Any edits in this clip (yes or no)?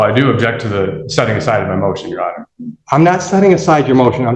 no